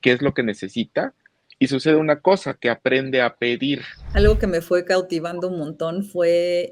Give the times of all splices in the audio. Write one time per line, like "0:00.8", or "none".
0:04.0